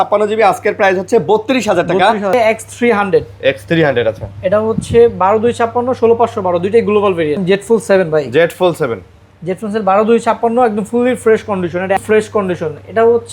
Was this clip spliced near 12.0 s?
yes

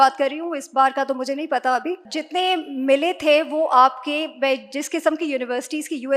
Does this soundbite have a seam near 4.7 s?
no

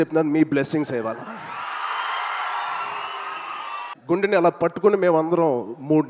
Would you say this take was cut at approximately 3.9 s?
yes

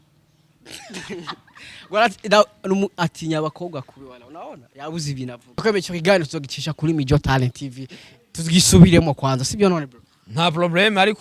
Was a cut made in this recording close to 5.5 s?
yes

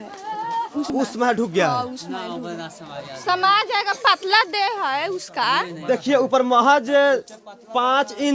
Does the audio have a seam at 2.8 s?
no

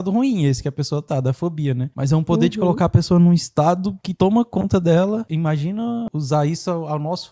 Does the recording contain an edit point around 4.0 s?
yes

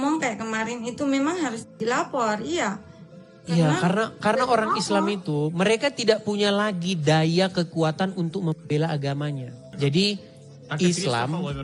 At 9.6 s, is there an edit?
yes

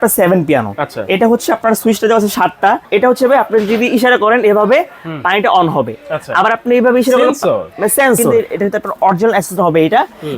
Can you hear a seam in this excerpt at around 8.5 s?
yes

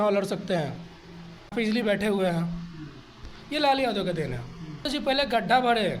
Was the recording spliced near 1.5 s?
yes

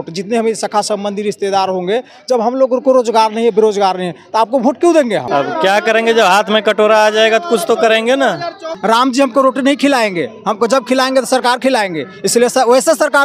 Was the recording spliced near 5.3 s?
yes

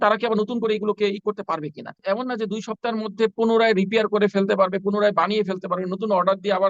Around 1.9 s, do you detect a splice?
yes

